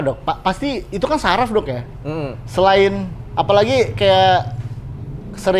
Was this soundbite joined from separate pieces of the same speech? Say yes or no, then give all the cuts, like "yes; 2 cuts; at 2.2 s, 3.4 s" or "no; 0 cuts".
no; 0 cuts